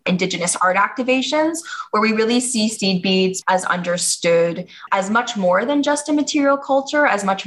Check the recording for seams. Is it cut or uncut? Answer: cut